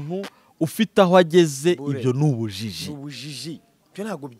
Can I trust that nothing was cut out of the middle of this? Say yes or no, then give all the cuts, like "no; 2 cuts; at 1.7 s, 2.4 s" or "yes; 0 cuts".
yes; 0 cuts